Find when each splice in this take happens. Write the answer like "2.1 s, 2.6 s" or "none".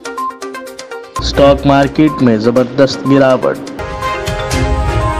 1.2 s, 3.7 s